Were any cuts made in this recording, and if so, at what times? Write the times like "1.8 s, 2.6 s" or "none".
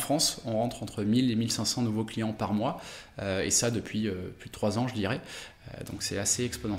none